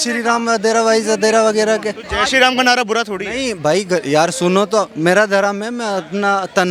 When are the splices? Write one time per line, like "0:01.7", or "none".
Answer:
none